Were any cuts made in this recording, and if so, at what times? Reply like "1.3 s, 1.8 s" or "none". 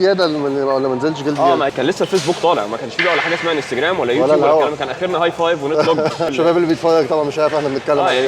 1.7 s, 6.3 s